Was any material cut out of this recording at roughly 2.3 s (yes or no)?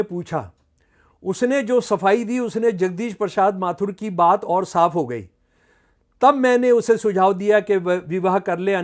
no